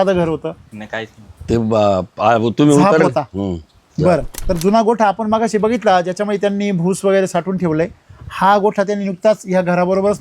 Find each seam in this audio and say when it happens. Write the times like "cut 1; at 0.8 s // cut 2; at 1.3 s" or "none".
cut 1; at 4.3 s